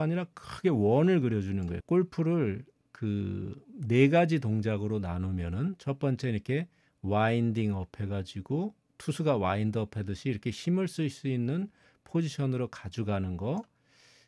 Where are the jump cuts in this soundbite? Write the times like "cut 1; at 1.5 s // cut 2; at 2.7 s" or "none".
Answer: cut 1; at 1.7 s